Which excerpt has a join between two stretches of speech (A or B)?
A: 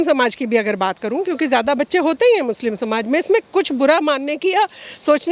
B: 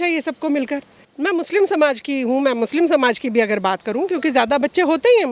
B